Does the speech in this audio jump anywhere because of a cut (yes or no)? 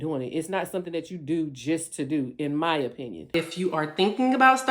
yes